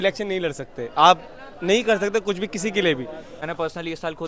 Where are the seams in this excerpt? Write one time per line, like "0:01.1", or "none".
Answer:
0:03.3